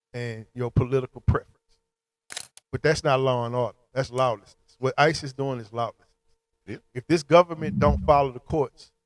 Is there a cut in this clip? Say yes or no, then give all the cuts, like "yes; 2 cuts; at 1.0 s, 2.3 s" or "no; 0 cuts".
no; 0 cuts